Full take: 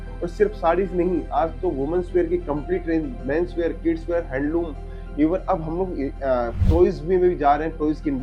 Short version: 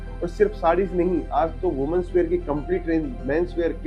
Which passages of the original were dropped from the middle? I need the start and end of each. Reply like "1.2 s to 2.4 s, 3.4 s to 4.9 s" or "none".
none